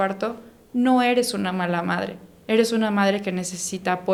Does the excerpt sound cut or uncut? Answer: uncut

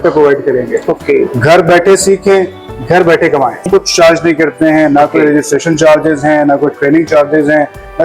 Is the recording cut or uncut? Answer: cut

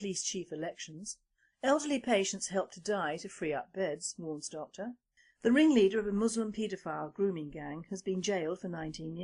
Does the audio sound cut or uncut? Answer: uncut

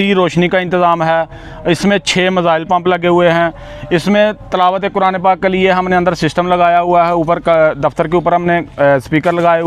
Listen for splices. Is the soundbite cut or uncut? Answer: uncut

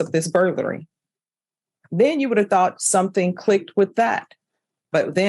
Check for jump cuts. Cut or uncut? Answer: uncut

